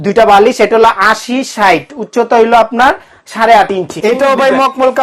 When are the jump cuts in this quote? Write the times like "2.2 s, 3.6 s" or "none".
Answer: 4.0 s